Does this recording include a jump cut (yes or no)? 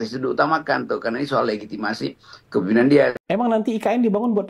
yes